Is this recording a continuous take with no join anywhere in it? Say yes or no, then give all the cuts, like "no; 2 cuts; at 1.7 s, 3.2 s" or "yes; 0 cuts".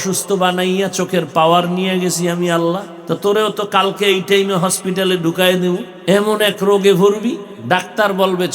no; 3 cuts; at 2.9 s, 5.9 s, 7.5 s